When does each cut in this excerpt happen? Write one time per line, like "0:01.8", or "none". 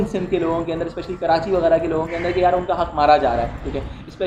none